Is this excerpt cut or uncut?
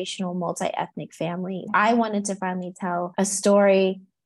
cut